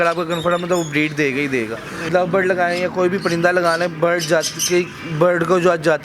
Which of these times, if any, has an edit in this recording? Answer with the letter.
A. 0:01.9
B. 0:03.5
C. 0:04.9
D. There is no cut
A